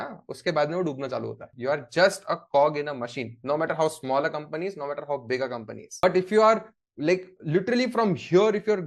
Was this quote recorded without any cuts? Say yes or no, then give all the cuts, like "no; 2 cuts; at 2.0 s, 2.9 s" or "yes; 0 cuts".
no; 2 cuts; at 1.5 s, 6.0 s